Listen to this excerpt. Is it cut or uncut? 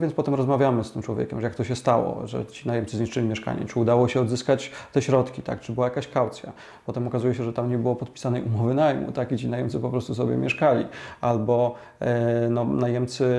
uncut